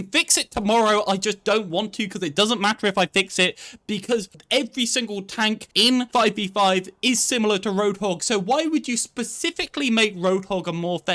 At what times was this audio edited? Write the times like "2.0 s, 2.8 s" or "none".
4.4 s, 5.9 s